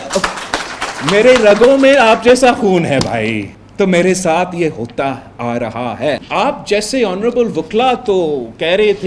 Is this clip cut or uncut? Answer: cut